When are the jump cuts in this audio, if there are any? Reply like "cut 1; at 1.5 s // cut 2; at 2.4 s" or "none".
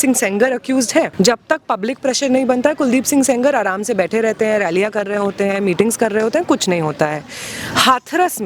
cut 1; at 1.1 s